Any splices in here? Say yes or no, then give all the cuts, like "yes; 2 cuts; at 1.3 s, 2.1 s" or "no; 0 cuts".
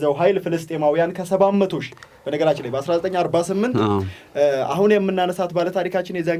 no; 0 cuts